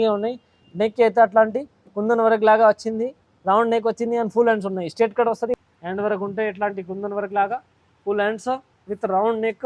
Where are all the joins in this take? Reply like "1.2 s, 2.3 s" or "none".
5.6 s